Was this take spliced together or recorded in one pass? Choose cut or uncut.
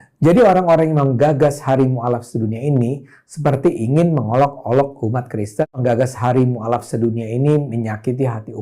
cut